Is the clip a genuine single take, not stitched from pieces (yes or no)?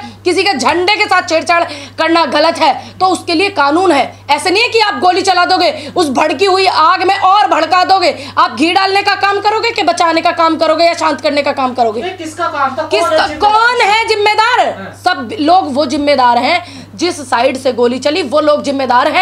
yes